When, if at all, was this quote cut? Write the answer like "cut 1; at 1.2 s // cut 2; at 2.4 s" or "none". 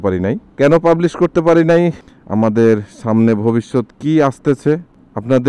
cut 1; at 2.0 s